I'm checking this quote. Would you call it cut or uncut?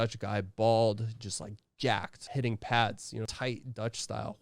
cut